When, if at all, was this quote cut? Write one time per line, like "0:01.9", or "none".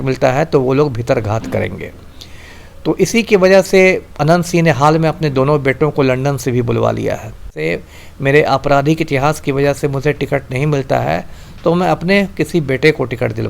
0:07.6